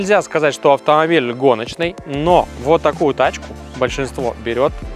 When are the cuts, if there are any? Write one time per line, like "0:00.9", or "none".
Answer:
none